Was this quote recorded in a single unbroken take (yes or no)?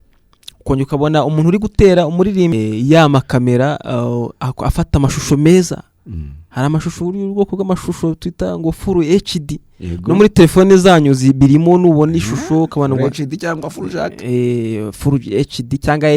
no